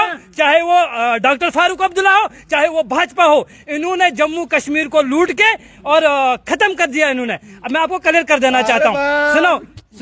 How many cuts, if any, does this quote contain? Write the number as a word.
zero